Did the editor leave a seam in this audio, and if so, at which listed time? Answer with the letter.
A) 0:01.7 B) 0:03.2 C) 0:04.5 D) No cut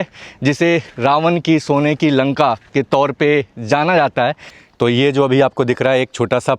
D